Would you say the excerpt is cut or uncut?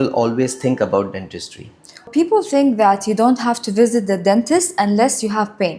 cut